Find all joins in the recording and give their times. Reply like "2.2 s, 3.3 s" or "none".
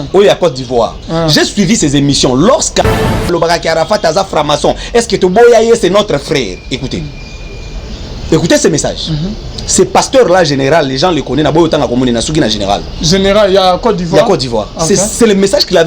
3.2 s